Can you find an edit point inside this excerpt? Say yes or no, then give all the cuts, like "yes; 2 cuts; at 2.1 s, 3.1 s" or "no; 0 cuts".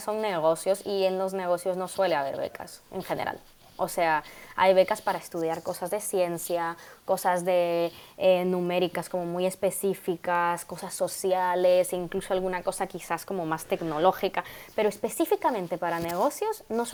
no; 0 cuts